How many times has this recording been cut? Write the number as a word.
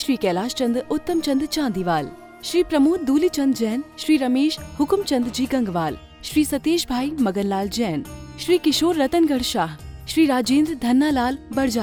zero